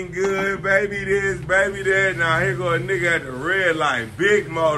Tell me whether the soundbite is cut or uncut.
uncut